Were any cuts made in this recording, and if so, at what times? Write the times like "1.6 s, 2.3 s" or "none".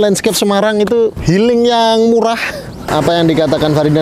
1.2 s, 2.9 s